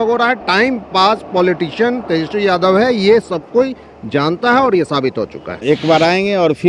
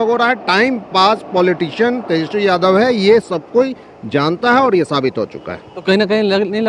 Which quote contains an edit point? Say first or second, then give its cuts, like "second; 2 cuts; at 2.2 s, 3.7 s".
first; 1 cut; at 5.5 s